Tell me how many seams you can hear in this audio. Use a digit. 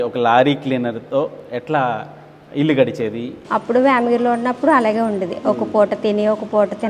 1